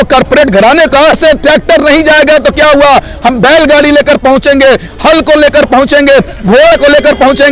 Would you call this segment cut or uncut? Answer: cut